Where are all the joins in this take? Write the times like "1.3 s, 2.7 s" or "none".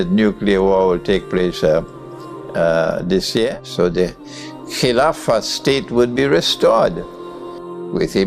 3.6 s